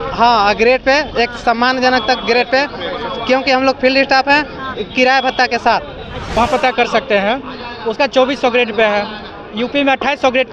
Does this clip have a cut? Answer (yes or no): yes